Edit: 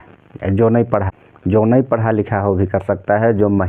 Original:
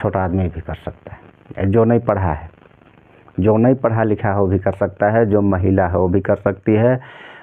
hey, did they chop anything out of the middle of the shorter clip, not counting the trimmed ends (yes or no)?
yes